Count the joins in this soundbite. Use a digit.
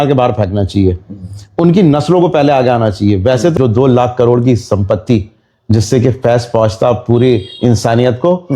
1